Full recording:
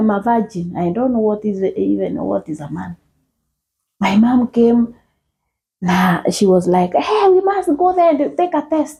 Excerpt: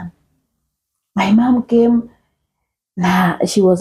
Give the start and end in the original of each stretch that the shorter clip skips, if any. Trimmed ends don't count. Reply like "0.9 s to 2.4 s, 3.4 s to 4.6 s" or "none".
none